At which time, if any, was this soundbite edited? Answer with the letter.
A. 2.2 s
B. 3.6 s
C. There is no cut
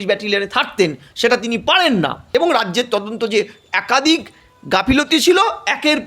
A